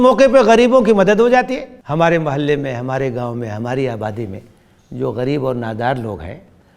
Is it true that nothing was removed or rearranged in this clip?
no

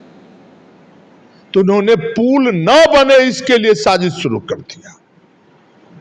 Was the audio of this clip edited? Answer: yes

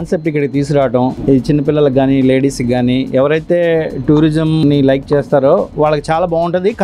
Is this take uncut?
no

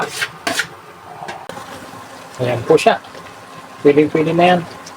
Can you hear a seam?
yes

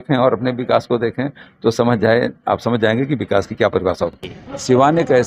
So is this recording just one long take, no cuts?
no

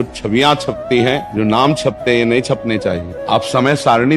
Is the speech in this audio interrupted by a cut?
yes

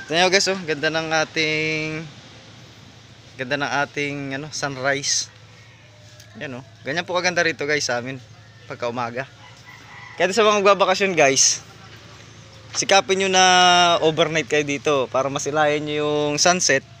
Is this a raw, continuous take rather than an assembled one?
yes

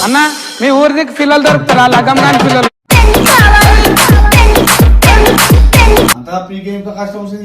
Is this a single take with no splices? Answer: no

